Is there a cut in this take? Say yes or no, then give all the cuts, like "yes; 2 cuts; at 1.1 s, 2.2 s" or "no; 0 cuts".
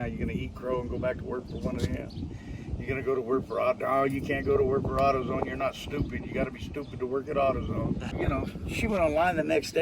yes; 1 cut; at 8.1 s